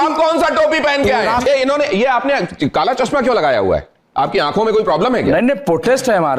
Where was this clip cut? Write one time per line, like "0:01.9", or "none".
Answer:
0:01.5